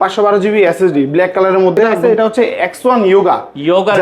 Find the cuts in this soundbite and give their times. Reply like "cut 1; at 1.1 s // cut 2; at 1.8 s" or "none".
cut 1; at 2.0 s